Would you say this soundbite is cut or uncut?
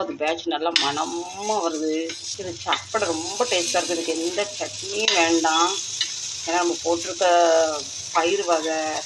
uncut